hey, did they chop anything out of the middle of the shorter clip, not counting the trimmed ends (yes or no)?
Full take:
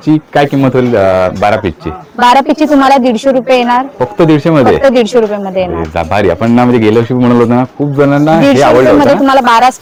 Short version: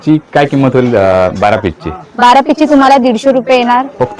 no